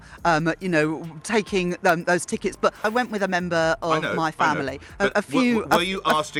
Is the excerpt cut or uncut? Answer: uncut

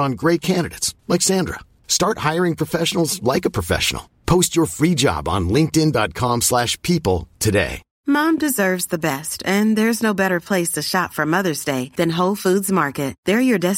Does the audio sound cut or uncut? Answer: cut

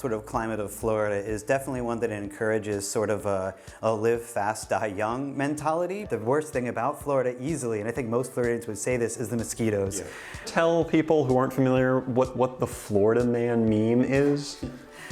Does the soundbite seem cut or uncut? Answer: cut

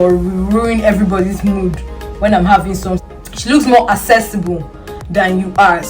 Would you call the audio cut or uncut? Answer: cut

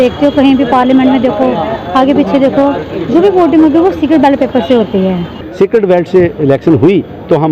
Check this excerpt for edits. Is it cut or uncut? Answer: cut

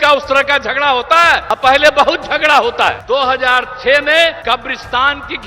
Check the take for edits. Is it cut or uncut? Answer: cut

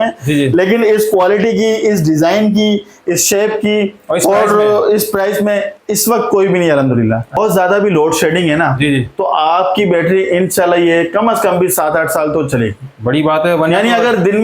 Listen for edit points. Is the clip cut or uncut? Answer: cut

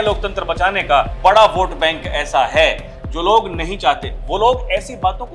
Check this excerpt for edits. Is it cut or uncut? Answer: cut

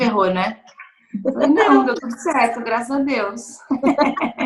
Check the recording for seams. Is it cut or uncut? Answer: uncut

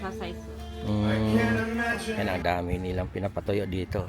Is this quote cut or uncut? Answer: cut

